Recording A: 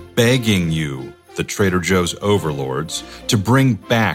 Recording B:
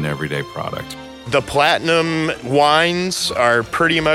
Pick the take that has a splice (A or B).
B